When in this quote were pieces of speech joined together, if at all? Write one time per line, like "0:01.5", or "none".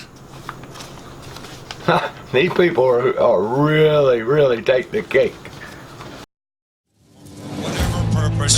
0:06.3